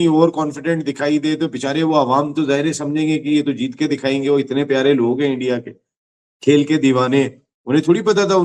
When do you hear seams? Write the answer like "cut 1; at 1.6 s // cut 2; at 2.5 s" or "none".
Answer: none